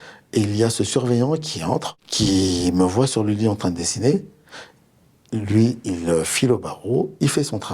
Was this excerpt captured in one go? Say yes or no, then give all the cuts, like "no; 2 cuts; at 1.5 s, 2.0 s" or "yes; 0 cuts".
yes; 0 cuts